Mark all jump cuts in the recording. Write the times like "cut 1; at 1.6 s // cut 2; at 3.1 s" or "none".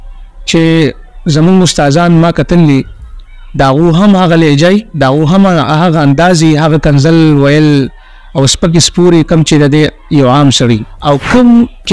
cut 1; at 10.9 s